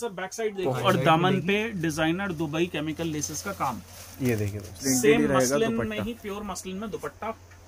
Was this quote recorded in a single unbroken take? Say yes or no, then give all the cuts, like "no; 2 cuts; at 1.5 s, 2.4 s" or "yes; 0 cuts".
no; 2 cuts; at 0.8 s, 4.8 s